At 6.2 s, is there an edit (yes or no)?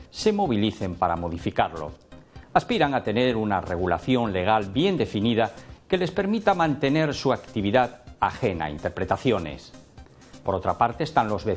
yes